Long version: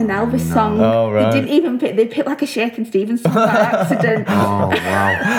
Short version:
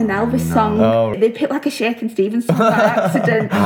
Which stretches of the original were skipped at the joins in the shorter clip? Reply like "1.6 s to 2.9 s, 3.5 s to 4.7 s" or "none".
1.1 s to 1.9 s